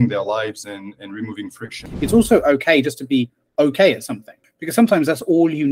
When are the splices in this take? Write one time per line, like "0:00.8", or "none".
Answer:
0:01.8
0:04.5